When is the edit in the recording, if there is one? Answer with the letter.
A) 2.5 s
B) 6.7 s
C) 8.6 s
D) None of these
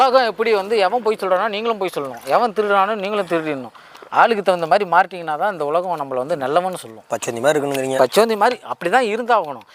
D